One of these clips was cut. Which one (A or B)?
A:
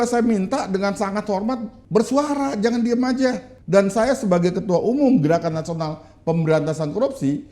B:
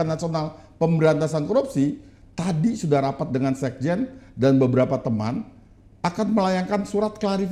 A